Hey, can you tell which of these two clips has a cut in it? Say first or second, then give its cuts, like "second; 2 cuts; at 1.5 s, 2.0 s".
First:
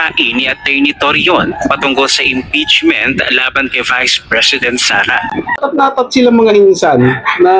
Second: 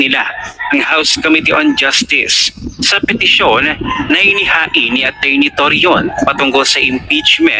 first; 1 cut; at 5.6 s